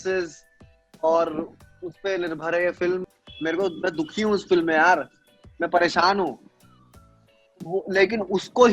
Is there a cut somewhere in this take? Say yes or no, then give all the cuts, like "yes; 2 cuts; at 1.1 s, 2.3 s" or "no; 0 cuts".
yes; 1 cut; at 3.1 s